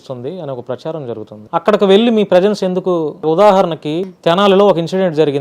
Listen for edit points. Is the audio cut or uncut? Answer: cut